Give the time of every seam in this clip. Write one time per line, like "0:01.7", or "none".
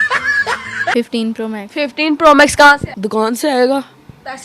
0:00.9
0:02.9